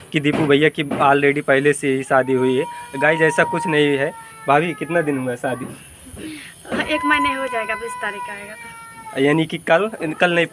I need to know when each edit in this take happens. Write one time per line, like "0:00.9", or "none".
none